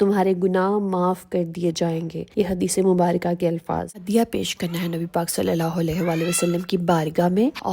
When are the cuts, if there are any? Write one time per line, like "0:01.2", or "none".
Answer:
0:04.0